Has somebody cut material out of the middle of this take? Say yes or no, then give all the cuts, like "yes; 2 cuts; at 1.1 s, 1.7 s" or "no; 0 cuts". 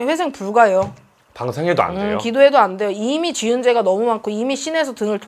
no; 0 cuts